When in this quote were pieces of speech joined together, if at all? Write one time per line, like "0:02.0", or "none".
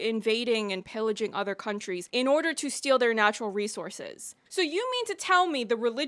0:04.3